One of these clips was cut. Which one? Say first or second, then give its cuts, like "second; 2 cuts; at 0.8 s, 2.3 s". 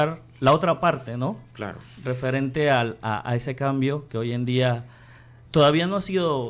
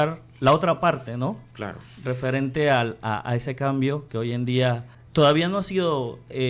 second; 1 cut; at 4.9 s